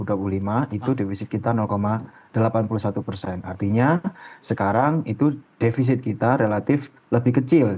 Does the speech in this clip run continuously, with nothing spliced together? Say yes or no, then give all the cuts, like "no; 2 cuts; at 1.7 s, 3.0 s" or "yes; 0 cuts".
yes; 0 cuts